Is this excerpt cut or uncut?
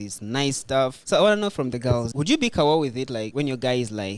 cut